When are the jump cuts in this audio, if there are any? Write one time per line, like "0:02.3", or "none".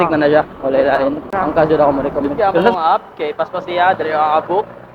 0:02.7